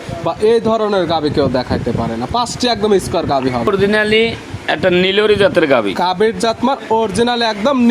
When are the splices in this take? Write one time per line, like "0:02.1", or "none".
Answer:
0:03.7